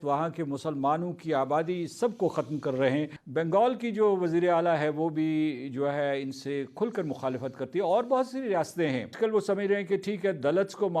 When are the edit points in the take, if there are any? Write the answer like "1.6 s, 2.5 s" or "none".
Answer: 3.2 s, 9.1 s